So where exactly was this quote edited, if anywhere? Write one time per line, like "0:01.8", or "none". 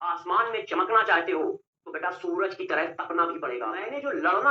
0:03.6